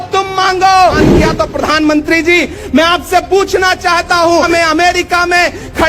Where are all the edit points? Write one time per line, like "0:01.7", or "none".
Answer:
0:01.0
0:04.5